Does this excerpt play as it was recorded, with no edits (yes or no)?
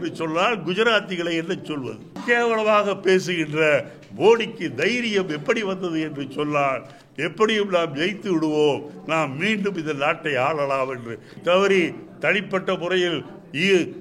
no